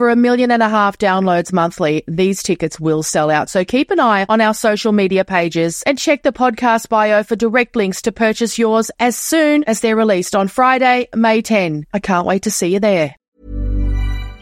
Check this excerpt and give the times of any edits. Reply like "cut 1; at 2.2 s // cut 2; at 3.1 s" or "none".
cut 1; at 13.3 s